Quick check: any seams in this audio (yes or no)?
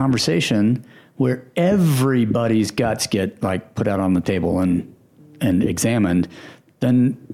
no